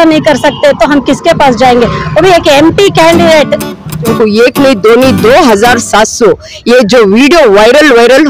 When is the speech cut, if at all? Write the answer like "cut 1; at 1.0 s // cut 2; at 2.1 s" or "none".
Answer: cut 1; at 4.1 s